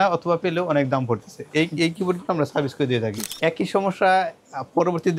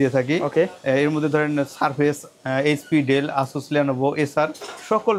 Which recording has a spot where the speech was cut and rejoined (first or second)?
first